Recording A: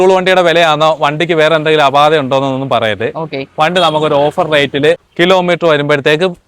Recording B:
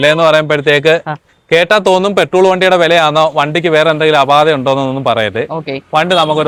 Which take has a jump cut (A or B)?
A